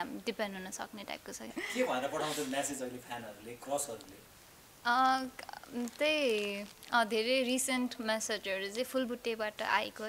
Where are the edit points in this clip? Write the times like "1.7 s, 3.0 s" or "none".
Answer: 1.5 s